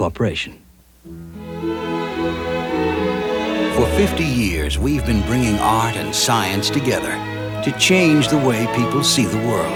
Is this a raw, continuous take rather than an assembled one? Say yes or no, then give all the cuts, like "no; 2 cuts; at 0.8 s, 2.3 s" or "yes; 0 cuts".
yes; 0 cuts